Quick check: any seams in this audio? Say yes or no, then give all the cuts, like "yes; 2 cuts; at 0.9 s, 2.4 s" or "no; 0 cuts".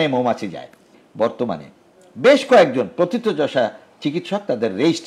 yes; 1 cut; at 1.0 s